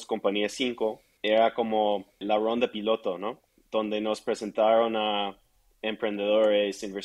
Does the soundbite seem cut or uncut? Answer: cut